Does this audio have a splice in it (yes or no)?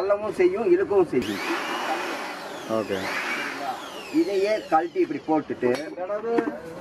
yes